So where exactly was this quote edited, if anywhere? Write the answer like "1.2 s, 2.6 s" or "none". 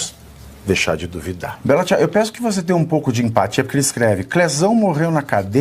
1.6 s